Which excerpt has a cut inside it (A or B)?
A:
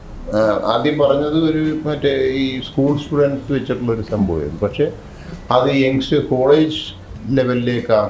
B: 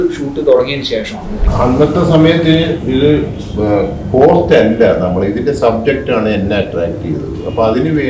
B